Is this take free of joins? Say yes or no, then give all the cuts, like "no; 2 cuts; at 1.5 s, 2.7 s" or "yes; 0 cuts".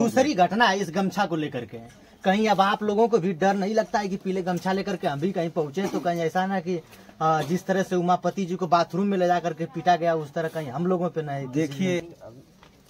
no; 1 cut; at 12.0 s